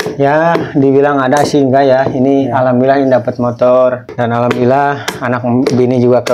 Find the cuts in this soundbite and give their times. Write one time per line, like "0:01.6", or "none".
0:04.1